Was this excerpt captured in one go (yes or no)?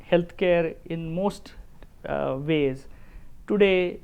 yes